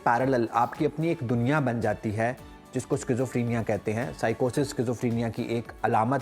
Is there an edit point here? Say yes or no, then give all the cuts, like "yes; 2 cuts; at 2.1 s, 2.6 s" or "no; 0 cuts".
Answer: no; 0 cuts